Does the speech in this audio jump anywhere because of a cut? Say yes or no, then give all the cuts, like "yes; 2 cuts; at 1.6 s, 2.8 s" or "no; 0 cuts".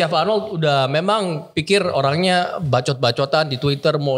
no; 0 cuts